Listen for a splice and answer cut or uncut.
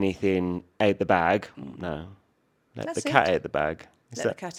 uncut